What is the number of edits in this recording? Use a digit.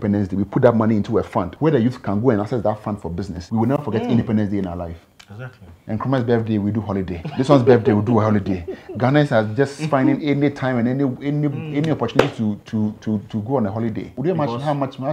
2